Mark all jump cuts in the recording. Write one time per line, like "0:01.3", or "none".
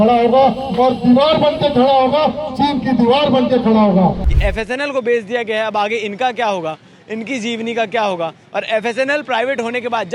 0:04.3